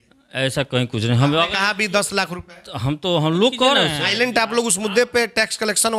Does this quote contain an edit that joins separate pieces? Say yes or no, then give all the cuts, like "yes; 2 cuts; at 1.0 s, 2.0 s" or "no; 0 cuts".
yes; 1 cut; at 4.0 s